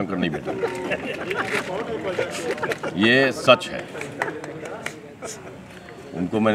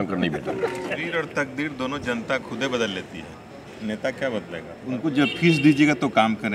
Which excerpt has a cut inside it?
second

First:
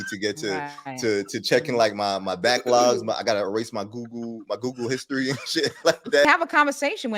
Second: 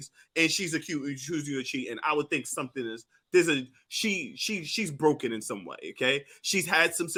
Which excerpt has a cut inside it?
first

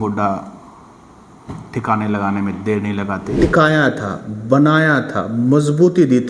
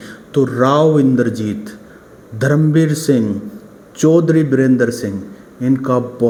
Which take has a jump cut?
first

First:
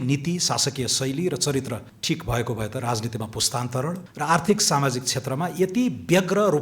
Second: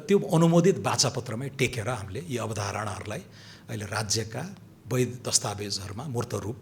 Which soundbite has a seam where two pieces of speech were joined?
first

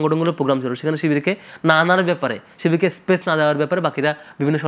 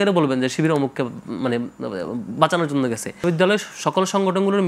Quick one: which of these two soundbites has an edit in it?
second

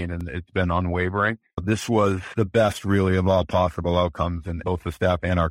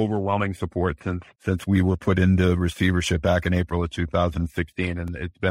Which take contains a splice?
first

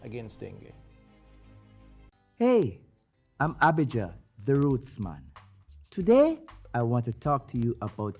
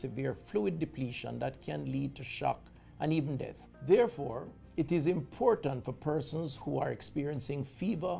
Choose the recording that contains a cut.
first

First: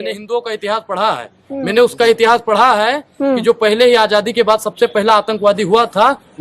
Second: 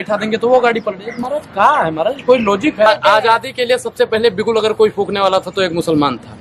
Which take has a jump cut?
second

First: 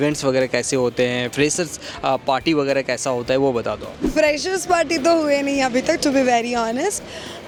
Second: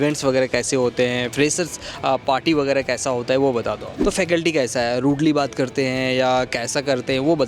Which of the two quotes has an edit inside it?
second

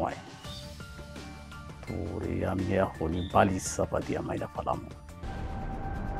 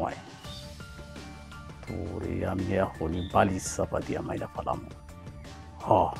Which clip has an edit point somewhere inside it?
first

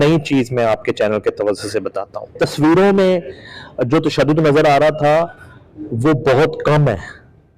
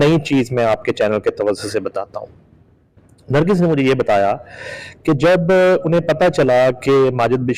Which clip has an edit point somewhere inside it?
first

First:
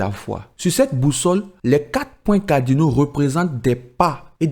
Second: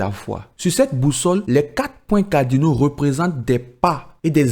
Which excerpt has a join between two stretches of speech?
second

